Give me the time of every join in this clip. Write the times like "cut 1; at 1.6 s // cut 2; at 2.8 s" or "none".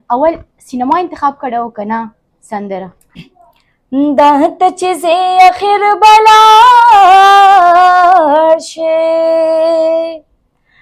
cut 1; at 3.3 s